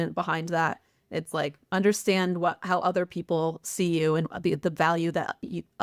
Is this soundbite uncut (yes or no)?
yes